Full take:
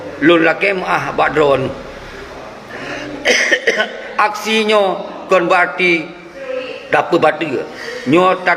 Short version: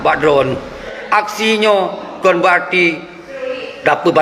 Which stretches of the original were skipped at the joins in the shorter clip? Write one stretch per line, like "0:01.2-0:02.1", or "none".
0:02.1-0:04.0